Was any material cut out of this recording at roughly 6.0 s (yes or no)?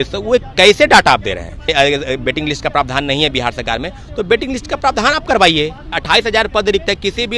yes